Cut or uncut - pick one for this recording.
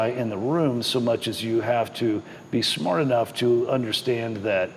uncut